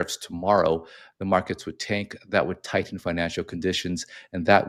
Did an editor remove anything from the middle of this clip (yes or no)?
no